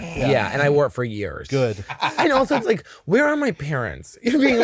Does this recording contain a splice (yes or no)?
yes